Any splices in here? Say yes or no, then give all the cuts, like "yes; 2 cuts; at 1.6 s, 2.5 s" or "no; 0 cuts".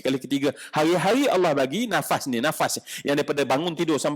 no; 0 cuts